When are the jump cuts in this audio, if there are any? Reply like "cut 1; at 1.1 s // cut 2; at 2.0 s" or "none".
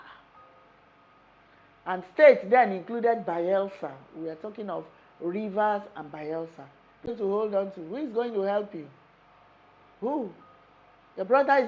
cut 1; at 7.1 s